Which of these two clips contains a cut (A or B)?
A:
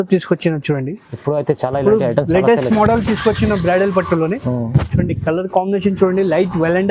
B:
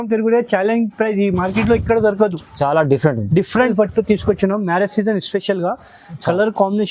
B